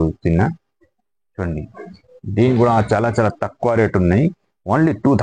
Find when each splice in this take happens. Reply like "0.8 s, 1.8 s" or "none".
none